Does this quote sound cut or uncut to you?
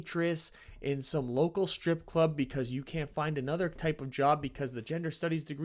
uncut